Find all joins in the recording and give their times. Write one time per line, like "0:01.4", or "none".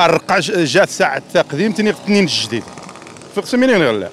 none